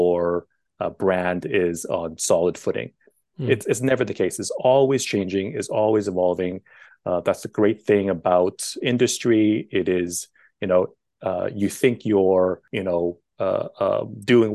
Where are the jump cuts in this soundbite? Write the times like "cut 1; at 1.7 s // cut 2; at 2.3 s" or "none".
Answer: cut 1; at 12.7 s